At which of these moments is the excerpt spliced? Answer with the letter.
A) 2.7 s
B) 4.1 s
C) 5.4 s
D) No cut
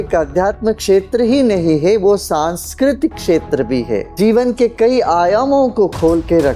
B